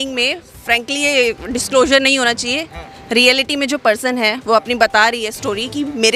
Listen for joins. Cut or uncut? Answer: uncut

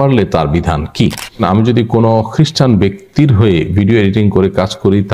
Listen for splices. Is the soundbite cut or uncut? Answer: cut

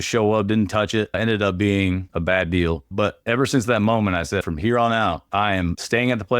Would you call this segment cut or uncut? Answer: cut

